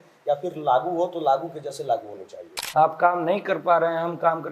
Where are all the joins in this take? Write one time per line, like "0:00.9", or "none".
0:02.6